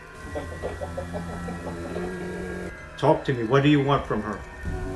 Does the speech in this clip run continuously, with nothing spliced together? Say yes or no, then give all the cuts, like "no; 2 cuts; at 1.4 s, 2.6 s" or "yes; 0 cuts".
no; 1 cut; at 2.7 s